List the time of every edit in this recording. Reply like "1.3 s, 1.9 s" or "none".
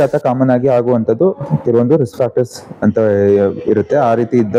none